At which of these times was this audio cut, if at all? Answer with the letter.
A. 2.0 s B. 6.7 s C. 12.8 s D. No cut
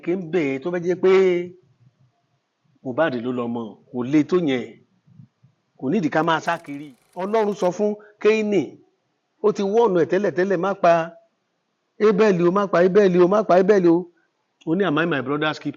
B